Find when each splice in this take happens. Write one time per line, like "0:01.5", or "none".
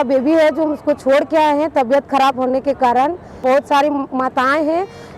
0:03.4